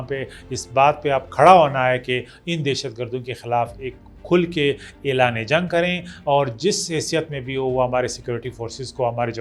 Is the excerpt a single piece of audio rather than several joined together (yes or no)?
yes